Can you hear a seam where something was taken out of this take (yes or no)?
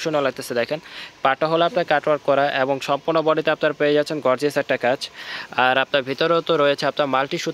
no